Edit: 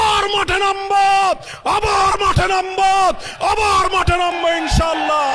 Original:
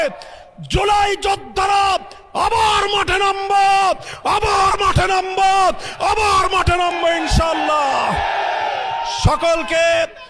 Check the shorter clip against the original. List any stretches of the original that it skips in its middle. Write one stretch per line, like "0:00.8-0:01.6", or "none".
none